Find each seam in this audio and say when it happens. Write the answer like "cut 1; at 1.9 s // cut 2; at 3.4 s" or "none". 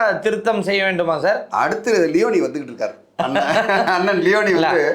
none